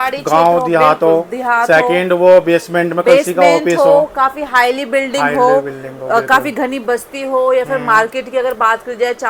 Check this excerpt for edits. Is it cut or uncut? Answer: uncut